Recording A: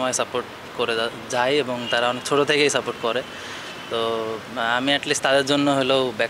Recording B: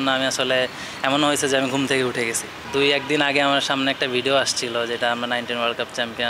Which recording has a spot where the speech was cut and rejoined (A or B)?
B